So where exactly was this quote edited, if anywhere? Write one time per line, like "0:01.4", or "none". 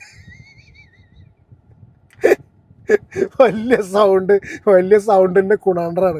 none